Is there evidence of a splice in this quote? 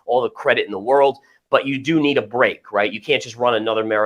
no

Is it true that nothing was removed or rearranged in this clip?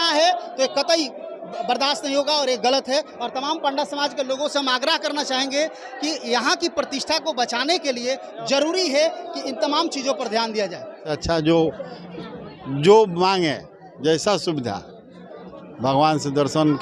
no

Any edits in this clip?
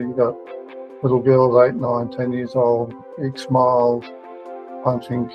no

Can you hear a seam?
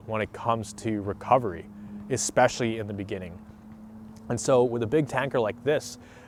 no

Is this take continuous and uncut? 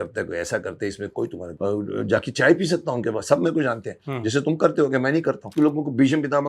no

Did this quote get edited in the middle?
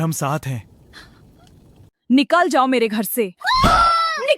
yes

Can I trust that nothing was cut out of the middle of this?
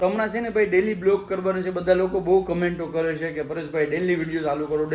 yes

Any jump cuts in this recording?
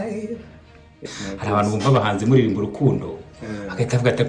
yes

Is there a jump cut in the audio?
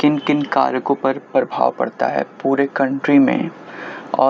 no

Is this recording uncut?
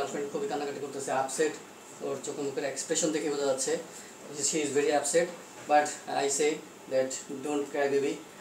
yes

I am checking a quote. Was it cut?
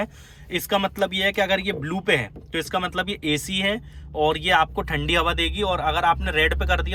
no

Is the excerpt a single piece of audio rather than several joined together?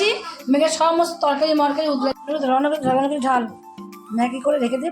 no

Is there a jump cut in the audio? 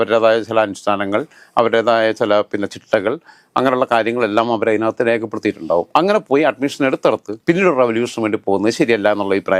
no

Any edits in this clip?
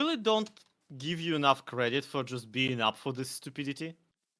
no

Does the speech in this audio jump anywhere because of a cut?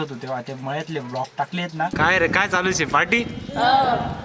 yes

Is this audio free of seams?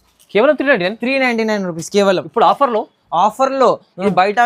yes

